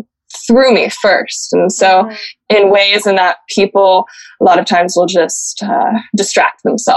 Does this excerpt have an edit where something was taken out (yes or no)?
yes